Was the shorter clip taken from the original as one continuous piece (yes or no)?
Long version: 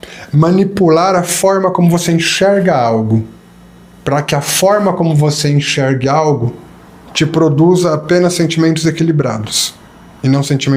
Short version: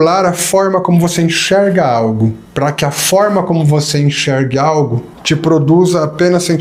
no